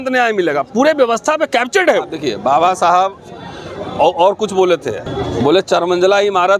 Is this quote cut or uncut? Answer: cut